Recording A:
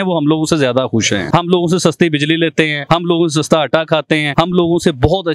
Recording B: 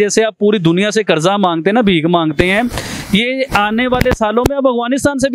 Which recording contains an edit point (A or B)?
A